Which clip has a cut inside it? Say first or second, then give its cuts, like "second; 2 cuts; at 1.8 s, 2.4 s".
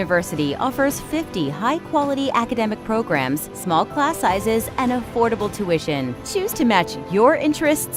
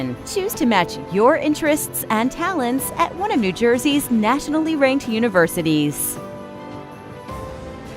second; 1 cut; at 5.9 s